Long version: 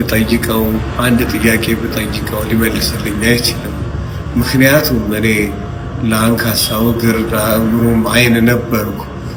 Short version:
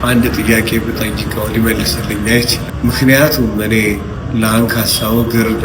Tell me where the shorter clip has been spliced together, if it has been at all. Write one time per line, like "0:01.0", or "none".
0:02.6
0:04.1

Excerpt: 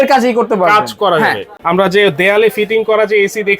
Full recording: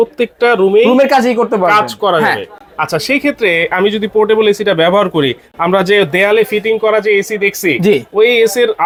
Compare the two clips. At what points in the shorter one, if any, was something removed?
0:01.5

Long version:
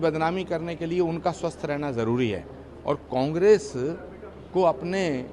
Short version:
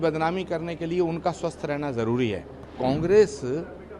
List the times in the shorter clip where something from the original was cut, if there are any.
0:02.7

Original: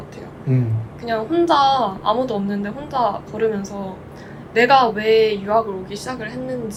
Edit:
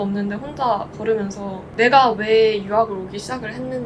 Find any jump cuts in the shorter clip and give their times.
0:01.6

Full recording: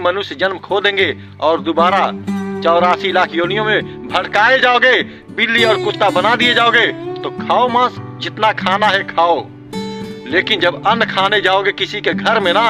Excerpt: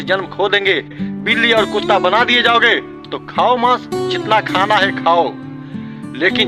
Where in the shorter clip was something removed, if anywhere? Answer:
0:01.0

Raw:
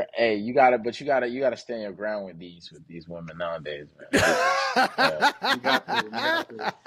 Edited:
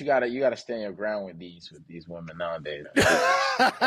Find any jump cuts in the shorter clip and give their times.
0:02.8

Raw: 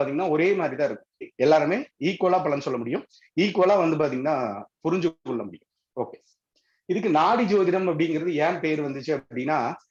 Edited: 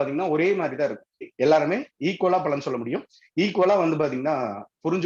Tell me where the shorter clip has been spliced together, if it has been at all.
none

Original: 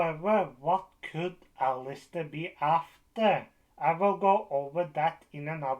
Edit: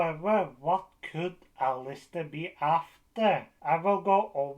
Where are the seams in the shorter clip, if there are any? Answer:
0:03.5

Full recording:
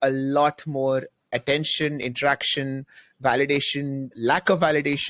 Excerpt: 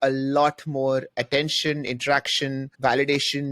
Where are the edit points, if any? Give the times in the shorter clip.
0:01.1
0:02.7

